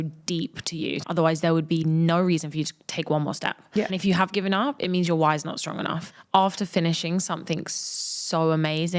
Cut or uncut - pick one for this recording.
cut